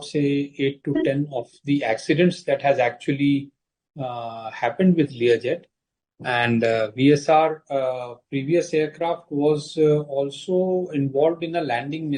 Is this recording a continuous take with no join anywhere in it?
yes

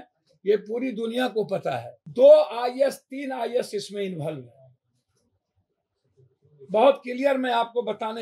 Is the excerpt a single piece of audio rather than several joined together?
no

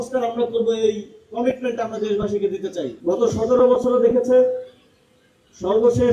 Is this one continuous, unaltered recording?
no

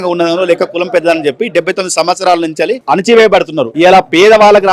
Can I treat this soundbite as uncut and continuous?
no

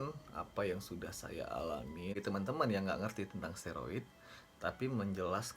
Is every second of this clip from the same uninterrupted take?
no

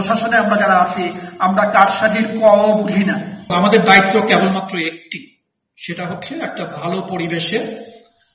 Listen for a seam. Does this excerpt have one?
yes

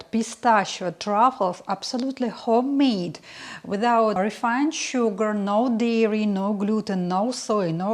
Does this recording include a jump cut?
yes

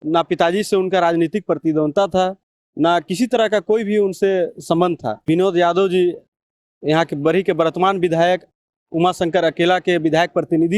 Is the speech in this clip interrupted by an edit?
yes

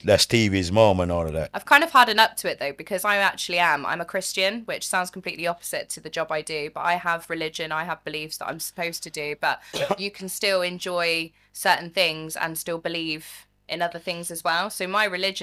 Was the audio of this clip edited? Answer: no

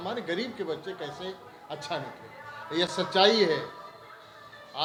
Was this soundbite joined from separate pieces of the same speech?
no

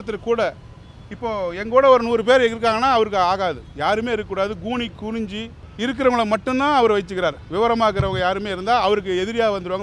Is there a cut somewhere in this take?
yes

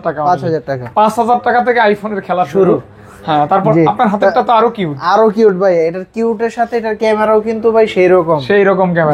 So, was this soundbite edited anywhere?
no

